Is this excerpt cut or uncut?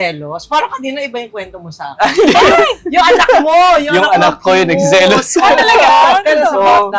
uncut